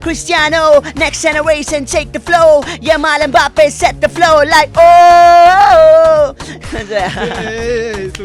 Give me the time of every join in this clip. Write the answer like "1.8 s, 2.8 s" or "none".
none